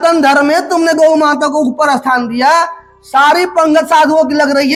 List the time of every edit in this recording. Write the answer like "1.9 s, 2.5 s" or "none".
none